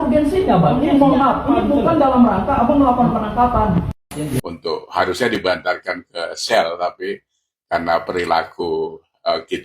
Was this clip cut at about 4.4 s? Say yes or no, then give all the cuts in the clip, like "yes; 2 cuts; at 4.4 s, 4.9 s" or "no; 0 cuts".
yes; 1 cut; at 4.4 s